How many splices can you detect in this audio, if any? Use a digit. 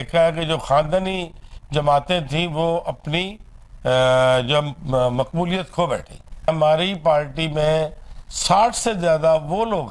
1